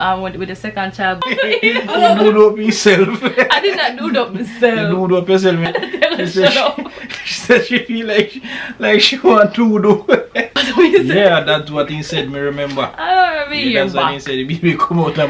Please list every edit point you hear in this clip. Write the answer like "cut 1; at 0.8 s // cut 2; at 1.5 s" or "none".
cut 1; at 1.2 s // cut 2; at 5.7 s // cut 3; at 10.6 s